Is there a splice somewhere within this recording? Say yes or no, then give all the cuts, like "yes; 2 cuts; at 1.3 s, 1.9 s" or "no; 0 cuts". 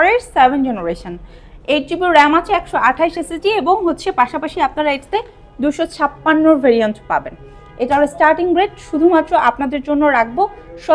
no; 0 cuts